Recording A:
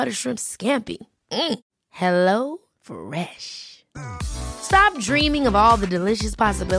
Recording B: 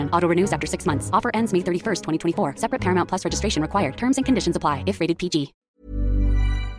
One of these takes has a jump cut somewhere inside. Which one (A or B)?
B